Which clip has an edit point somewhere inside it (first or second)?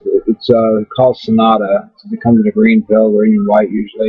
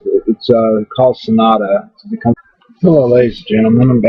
first